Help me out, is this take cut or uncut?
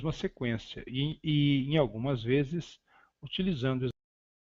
cut